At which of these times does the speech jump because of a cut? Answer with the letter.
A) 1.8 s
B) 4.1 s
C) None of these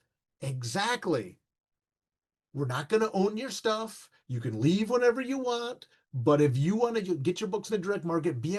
C